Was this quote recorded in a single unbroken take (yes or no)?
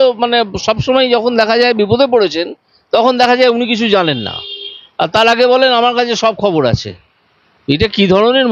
yes